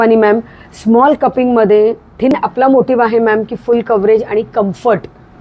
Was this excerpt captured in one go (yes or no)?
no